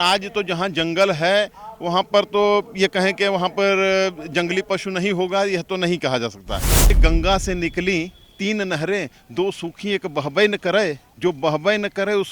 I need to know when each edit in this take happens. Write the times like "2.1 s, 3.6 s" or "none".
7.0 s